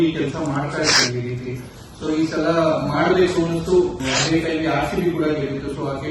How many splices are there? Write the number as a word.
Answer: one